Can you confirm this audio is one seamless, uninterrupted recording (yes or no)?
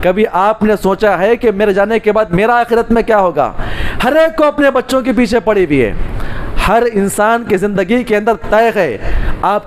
yes